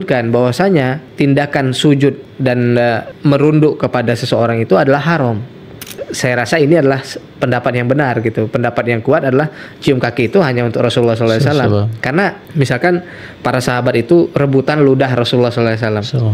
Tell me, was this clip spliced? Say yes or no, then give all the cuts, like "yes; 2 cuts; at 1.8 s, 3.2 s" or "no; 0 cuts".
yes; 4 cuts; at 1.0 s, 2.7 s, 5.8 s, 12.4 s